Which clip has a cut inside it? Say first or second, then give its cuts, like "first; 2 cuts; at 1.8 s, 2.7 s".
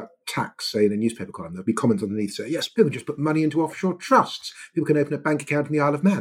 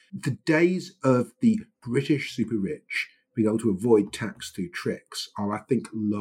first; 2 cuts; at 1.5 s, 2.7 s